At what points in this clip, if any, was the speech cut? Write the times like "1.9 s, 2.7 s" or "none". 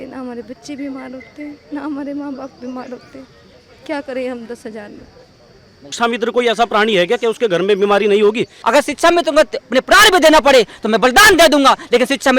5.9 s, 8.6 s